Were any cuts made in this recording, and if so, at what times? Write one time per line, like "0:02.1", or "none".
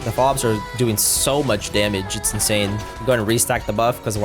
0:02.9